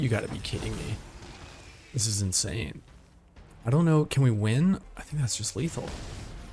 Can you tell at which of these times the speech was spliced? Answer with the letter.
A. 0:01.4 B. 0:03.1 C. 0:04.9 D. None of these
C